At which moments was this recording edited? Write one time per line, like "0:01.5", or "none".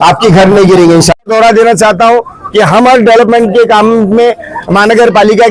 0:01.2